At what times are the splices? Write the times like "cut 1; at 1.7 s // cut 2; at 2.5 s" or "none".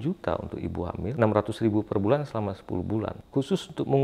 cut 1; at 1.1 s // cut 2; at 3.2 s